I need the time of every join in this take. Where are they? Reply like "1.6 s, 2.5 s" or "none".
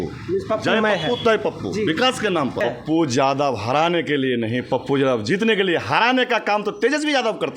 2.6 s

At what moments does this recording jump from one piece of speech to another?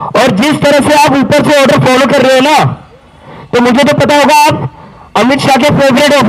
none

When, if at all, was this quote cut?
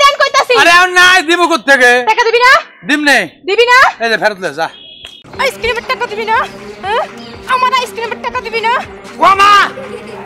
5.2 s, 9.1 s

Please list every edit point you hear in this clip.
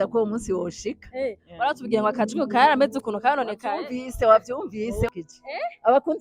5.1 s

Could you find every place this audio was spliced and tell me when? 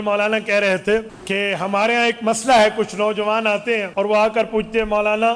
1.2 s, 3.9 s

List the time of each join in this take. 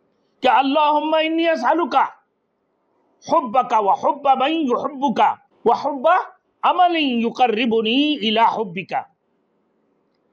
5.5 s

